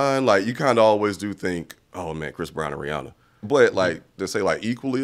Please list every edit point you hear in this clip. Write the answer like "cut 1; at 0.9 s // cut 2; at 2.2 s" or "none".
cut 1; at 1.8 s // cut 2; at 3.4 s